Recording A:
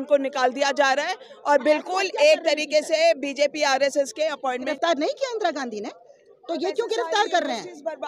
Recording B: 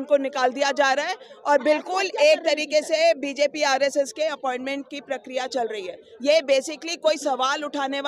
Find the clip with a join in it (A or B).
A